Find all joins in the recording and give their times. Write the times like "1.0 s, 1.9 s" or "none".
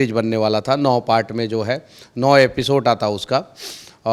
none